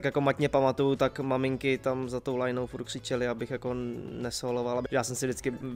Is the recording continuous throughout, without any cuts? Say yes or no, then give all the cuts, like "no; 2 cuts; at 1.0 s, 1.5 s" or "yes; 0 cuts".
no; 1 cut; at 4.9 s